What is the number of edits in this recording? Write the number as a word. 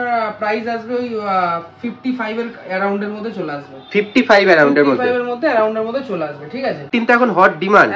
one